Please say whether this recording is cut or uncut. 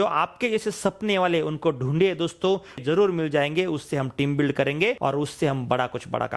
uncut